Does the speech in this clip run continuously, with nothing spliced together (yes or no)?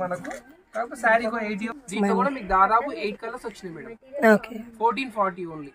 no